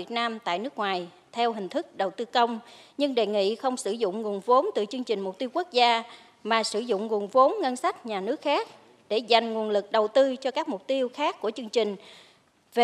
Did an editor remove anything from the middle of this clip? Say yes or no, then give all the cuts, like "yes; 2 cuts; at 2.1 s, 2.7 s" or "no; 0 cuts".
no; 0 cuts